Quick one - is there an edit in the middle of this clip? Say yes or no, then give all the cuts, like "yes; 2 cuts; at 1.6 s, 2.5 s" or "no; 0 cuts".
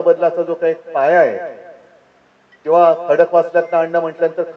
no; 0 cuts